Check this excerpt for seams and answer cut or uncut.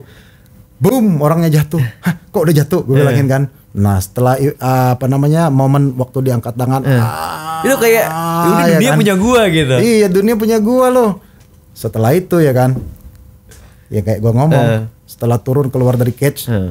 uncut